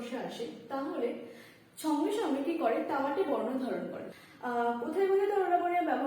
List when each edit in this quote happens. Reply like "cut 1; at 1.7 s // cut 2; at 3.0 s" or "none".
cut 1; at 4.0 s